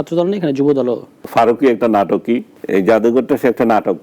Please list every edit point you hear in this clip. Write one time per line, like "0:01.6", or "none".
0:01.1
0:02.5